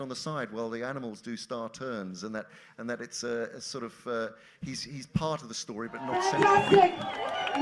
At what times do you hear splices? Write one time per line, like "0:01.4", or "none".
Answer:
0:06.2